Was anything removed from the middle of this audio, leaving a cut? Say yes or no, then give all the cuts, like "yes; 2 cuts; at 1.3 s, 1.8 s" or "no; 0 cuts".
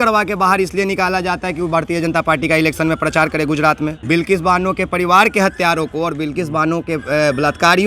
yes; 1 cut; at 4.0 s